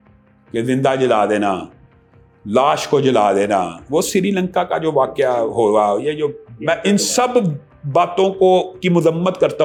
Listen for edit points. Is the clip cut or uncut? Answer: uncut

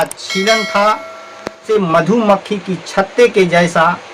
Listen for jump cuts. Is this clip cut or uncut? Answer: cut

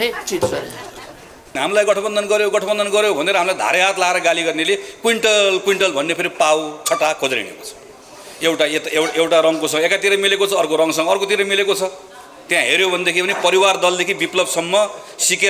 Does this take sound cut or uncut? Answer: cut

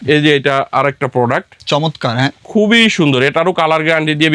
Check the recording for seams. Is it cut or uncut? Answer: uncut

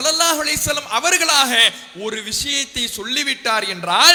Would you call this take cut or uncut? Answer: uncut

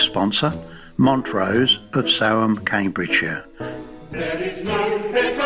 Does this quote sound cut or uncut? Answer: cut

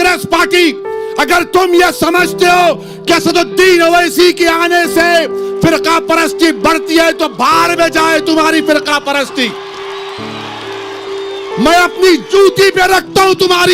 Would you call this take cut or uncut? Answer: uncut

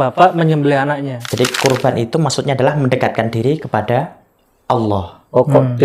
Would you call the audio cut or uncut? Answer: cut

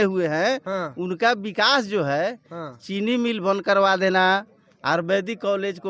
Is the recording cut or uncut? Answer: uncut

